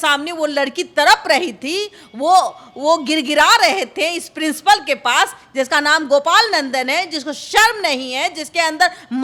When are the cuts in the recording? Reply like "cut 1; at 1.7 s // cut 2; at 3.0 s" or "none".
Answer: none